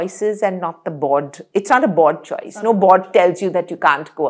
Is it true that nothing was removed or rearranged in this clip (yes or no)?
yes